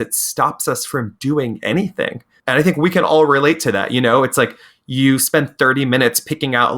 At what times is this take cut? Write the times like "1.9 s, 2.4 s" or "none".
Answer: 2.3 s